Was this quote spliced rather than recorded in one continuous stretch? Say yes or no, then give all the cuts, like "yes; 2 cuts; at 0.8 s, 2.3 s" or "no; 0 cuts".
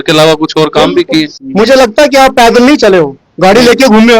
yes; 1 cut; at 1.4 s